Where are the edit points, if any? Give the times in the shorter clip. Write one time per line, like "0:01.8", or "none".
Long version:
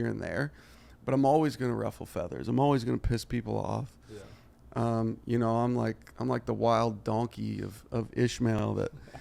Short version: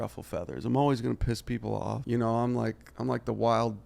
0:02.0